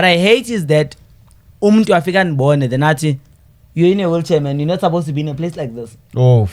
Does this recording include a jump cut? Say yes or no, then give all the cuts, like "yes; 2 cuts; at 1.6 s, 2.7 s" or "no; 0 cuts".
no; 0 cuts